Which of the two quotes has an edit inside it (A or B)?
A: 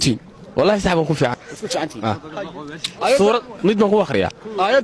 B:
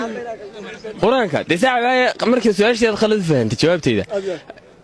A